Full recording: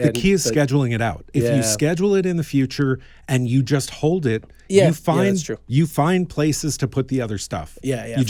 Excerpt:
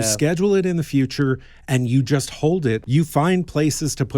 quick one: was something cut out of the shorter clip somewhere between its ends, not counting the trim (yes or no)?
yes